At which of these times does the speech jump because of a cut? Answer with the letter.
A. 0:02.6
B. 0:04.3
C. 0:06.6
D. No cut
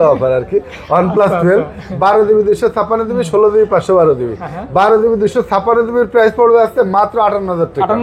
D